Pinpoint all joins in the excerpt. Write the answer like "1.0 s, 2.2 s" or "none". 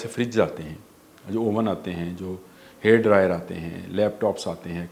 none